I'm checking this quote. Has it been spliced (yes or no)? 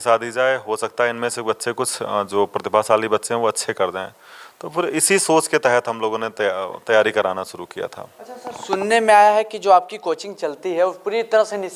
no